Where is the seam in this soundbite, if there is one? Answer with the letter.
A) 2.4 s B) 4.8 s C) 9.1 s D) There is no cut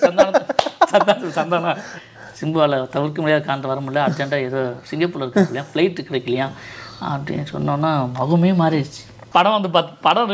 C